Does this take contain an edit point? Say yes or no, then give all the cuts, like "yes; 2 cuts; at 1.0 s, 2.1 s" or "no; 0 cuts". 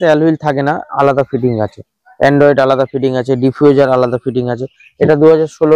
no; 0 cuts